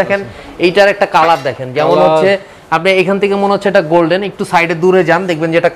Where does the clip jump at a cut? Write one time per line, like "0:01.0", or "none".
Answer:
none